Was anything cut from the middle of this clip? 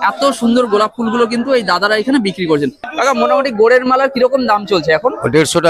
yes; 1 cut; at 2.8 s

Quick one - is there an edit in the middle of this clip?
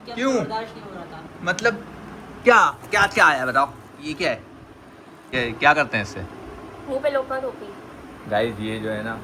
yes; 1 cut; at 5.3 s

